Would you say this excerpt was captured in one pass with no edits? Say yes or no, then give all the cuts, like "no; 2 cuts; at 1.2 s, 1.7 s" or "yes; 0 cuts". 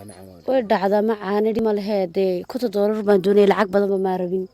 no; 1 cut; at 1.6 s